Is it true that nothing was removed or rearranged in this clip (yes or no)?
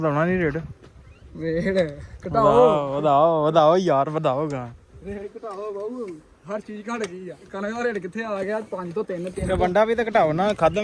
yes